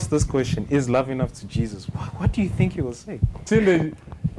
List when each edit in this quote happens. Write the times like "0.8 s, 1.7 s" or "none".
3.5 s